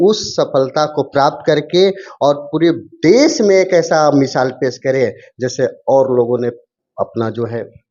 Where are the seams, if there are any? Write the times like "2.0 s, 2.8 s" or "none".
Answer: none